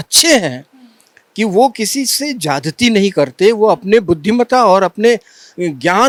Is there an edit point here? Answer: no; 0 cuts

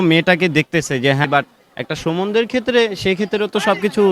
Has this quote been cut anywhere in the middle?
yes; 1 cut; at 1.2 s

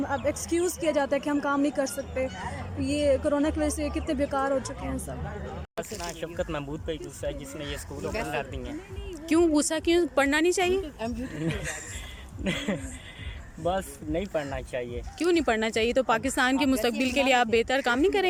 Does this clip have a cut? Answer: no; 0 cuts

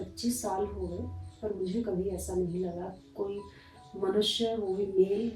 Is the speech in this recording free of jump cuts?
yes; 0 cuts

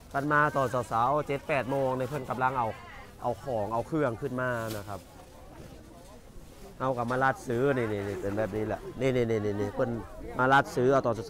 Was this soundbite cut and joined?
no; 0 cuts

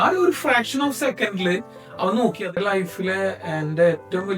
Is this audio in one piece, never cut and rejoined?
no; 1 cut; at 2.5 s

